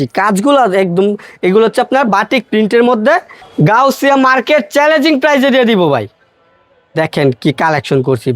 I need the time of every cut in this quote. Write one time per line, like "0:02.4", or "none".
0:03.4